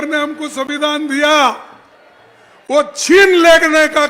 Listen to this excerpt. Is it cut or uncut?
uncut